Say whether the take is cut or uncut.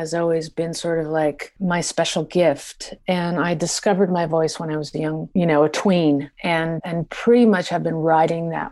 cut